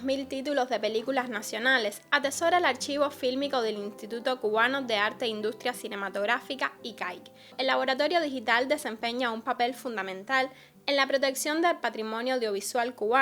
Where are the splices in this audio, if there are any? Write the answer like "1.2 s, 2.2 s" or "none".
7.5 s